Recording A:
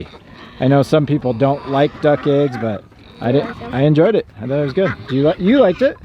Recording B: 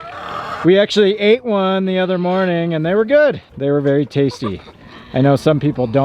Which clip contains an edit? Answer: B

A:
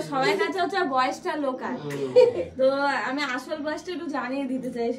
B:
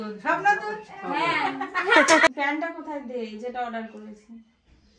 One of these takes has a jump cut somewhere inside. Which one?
B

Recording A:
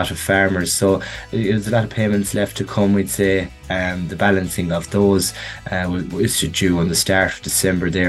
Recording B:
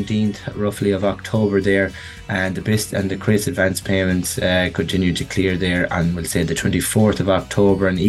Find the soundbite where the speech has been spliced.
A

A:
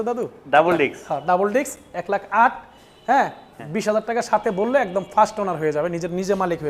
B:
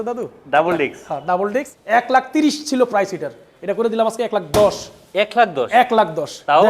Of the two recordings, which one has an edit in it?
B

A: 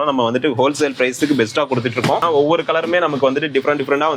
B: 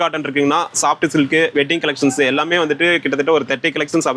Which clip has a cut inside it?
A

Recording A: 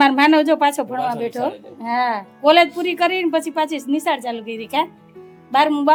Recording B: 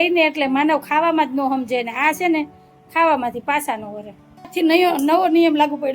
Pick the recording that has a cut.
B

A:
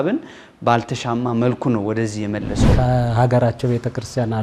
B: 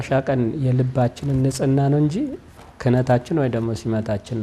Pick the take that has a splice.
A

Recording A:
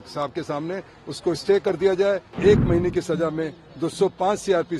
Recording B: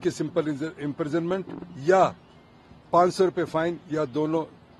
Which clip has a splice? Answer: A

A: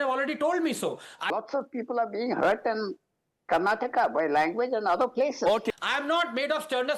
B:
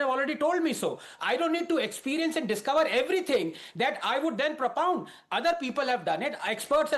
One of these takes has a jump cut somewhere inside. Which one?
A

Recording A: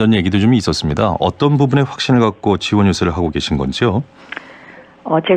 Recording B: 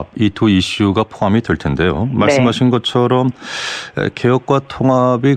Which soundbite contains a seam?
B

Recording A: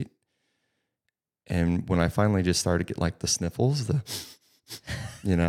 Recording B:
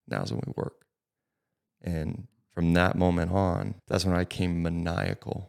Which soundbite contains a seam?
B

